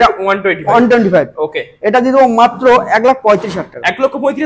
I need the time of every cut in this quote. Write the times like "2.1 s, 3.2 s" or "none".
none